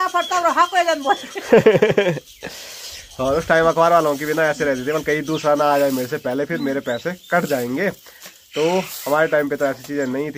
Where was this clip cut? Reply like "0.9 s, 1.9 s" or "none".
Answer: none